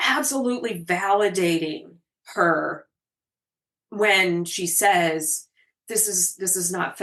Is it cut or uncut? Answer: uncut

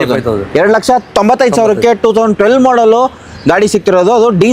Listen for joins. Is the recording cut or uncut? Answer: uncut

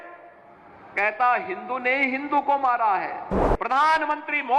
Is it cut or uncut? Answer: cut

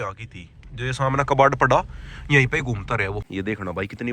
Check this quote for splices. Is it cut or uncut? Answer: cut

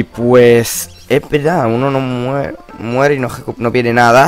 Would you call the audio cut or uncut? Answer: uncut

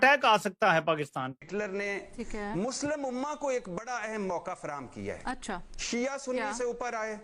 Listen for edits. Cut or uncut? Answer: cut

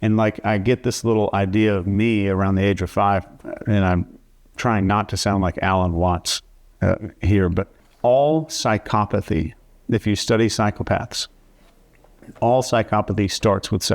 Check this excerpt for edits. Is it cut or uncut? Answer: cut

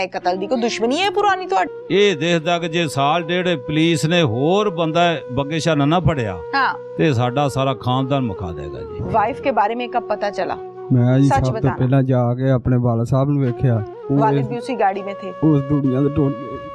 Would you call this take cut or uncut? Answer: uncut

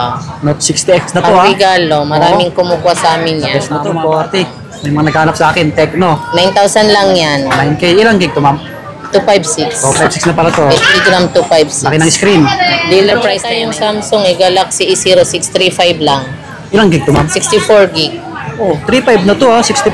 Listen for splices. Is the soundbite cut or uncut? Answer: cut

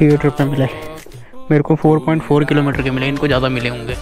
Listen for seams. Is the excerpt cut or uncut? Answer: uncut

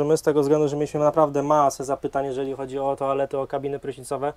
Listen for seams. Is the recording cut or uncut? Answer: uncut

